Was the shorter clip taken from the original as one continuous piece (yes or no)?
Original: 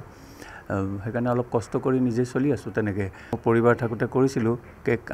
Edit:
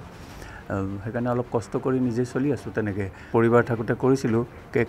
no